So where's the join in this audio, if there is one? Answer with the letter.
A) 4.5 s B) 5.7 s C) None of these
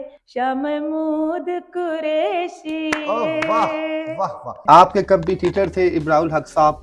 A